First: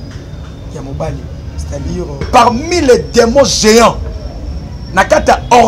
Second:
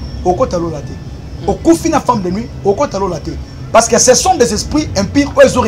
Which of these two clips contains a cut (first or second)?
first